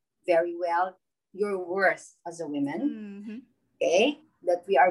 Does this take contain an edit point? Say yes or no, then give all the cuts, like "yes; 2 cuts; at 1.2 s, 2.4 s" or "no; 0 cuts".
no; 0 cuts